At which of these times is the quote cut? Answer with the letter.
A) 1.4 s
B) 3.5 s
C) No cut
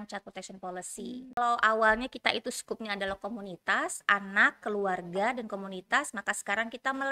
A